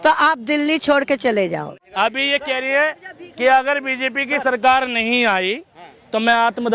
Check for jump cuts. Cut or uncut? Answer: cut